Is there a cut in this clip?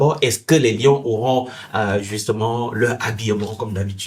no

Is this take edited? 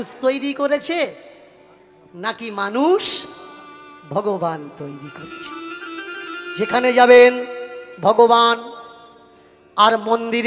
no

